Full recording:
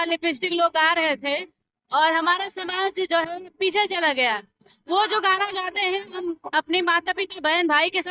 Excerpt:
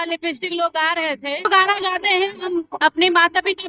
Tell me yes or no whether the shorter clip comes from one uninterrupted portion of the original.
no